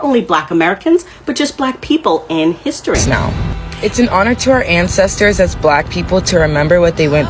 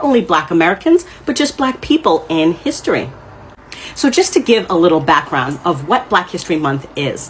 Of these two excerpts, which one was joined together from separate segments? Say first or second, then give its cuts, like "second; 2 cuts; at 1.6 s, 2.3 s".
first; 1 cut; at 3.0 s